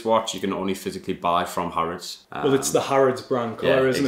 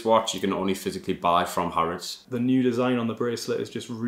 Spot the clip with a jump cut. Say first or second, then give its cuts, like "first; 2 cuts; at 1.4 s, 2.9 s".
second; 1 cut; at 2.2 s